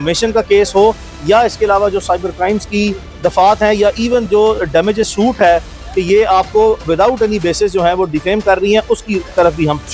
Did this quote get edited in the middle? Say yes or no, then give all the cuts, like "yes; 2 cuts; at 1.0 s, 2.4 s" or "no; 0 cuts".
no; 0 cuts